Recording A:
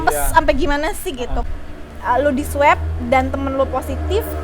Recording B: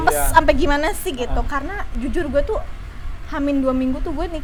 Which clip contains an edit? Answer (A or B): A